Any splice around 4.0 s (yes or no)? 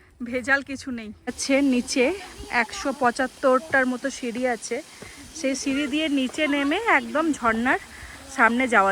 no